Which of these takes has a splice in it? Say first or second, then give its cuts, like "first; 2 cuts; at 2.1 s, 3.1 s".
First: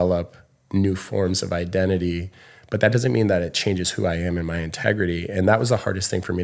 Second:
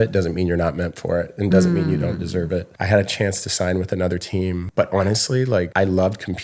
second; 3 cuts; at 2.7 s, 4.7 s, 5.7 s